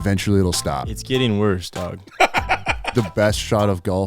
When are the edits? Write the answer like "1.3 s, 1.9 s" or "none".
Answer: 3.0 s